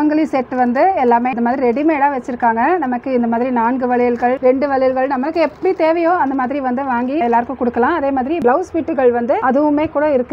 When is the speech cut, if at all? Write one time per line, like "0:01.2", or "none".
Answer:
none